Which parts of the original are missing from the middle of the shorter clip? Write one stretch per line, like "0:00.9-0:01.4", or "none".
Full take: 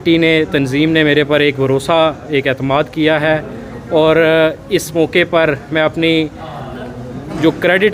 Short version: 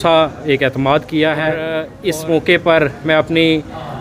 0:03.7-0:04.6